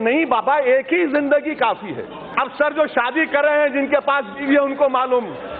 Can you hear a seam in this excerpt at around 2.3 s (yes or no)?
yes